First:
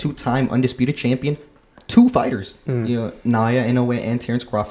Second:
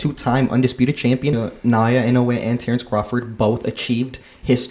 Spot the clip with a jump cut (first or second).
second